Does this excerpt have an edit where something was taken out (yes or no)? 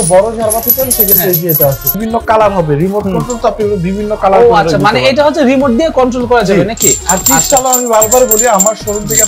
yes